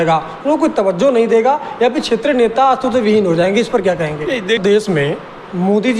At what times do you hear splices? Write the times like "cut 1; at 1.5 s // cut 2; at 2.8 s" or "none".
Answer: cut 1; at 4.6 s